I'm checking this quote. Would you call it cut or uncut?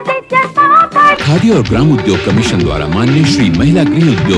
uncut